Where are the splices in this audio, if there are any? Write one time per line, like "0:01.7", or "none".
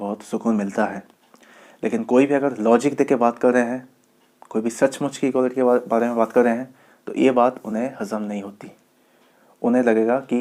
none